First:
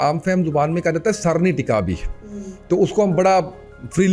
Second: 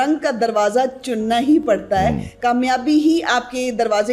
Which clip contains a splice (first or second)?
second